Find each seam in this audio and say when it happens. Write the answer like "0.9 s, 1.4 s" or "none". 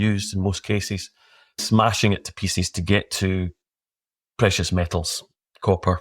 1.6 s